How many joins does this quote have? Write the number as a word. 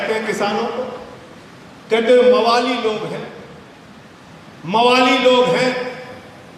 zero